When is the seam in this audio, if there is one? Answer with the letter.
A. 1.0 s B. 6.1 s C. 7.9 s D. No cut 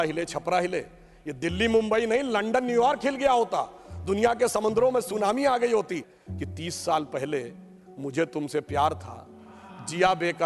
B